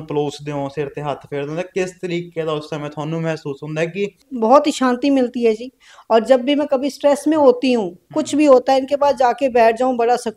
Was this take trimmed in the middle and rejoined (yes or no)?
yes